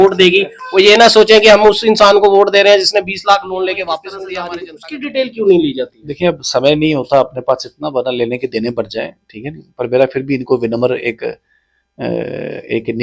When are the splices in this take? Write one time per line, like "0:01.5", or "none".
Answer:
0:04.3